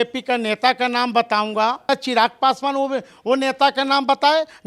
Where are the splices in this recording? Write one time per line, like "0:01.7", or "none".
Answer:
0:01.9